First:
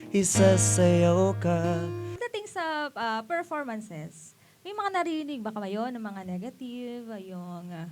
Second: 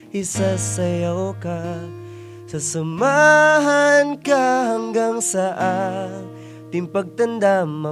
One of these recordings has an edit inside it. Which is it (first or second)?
first